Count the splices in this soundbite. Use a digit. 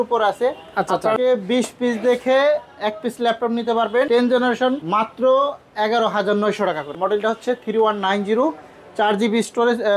4